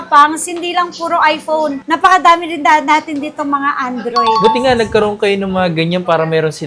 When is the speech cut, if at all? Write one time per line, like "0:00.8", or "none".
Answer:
none